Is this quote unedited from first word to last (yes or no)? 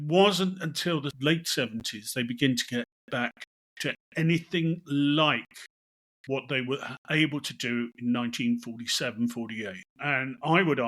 no